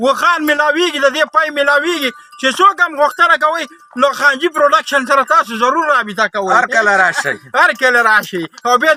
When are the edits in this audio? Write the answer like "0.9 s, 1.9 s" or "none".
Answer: none